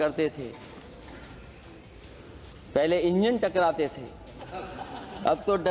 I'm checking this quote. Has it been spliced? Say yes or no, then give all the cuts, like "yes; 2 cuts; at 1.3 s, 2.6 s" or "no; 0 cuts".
no; 0 cuts